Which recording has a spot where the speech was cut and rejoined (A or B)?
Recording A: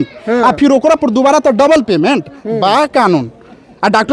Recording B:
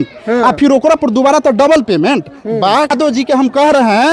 B